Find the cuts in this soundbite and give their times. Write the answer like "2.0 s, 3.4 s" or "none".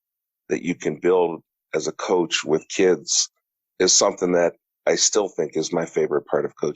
4.6 s

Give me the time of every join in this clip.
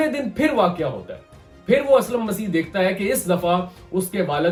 none

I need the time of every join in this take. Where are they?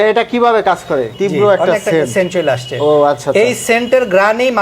1.1 s

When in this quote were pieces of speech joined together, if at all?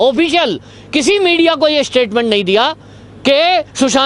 none

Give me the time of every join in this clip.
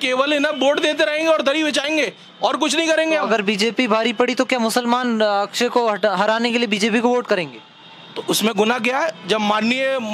none

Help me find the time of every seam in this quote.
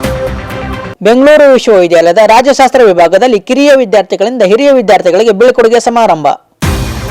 0.9 s

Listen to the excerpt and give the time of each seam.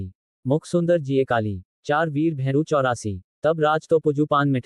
none

